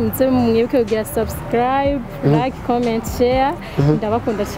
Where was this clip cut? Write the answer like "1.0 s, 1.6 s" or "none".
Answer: none